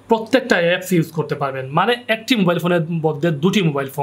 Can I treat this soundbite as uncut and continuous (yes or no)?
yes